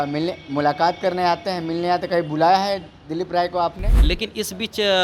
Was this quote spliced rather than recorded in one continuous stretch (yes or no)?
yes